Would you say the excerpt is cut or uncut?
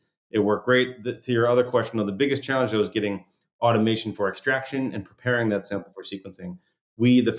uncut